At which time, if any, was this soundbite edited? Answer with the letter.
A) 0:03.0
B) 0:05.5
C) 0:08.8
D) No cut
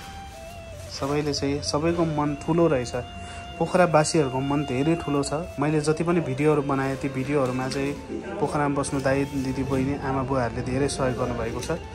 B